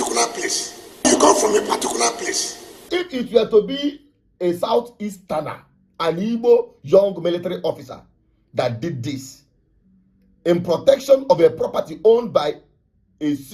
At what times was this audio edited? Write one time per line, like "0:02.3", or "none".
0:01.1
0:02.9